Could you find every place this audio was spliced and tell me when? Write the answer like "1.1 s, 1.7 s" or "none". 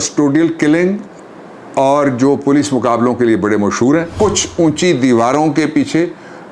4.1 s